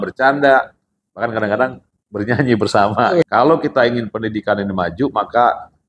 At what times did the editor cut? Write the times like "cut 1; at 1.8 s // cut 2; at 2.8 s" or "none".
cut 1; at 3.3 s